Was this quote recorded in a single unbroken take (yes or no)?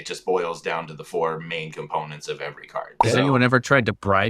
no